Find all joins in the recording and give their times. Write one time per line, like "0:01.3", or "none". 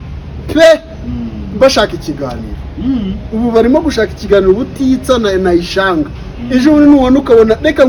none